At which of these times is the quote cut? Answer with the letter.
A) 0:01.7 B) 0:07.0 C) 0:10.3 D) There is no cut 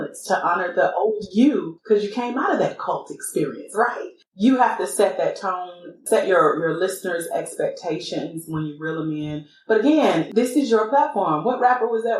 C